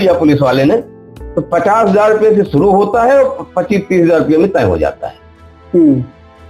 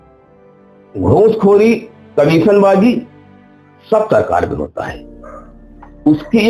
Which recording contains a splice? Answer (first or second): second